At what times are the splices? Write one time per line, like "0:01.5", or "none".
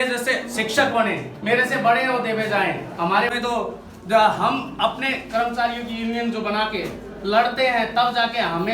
0:03.3